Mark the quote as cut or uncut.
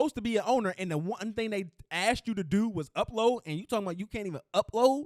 uncut